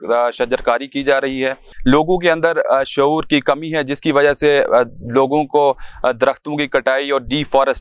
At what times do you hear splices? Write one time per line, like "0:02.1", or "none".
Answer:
0:01.7